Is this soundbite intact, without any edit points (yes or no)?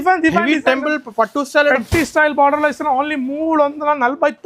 yes